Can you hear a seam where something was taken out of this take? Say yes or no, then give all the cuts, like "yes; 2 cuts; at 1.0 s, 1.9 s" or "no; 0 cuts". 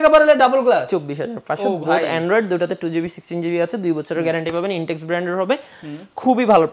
no; 0 cuts